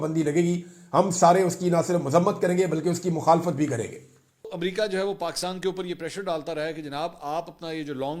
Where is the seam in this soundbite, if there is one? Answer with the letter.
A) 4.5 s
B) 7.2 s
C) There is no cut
A